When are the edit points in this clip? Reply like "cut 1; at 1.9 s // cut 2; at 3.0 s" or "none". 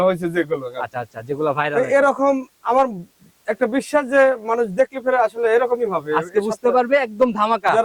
none